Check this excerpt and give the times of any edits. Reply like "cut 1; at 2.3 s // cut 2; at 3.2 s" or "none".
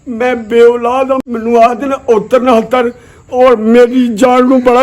cut 1; at 1.2 s